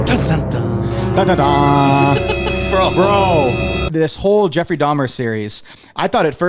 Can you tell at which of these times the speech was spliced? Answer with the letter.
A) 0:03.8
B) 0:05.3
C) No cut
A